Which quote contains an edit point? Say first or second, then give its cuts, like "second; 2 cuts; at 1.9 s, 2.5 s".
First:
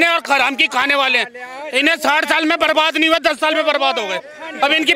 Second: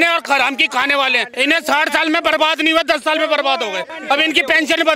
second; 2 cuts; at 1.3 s, 3.9 s